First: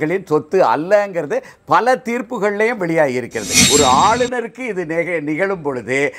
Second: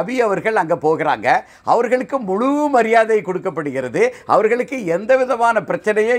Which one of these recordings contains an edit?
first; 1 cut; at 3.6 s

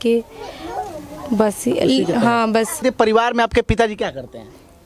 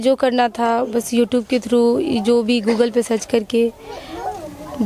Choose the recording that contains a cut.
first; 1 cut; at 2.8 s

